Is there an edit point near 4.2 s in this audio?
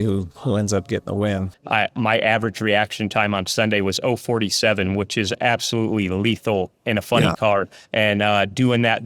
no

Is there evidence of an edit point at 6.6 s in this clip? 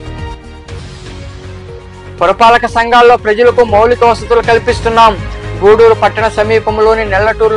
no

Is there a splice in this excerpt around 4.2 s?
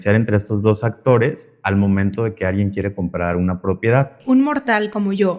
yes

